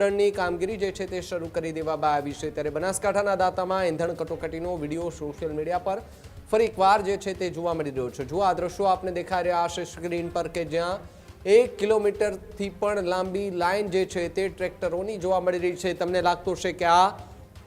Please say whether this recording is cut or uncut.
uncut